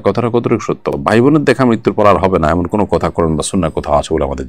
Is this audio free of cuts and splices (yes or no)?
yes